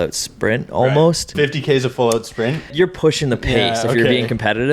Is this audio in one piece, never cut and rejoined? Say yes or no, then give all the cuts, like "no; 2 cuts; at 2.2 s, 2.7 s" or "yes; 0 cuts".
no; 2 cuts; at 1.3 s, 2.7 s